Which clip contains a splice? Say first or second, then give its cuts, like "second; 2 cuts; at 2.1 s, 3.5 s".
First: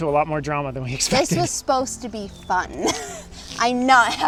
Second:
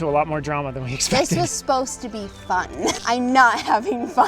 second; 1 cut; at 3.0 s